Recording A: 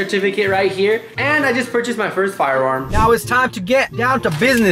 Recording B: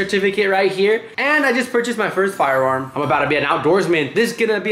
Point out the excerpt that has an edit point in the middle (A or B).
A